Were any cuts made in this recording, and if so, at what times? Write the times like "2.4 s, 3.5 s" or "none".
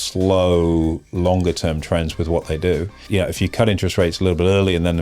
3.0 s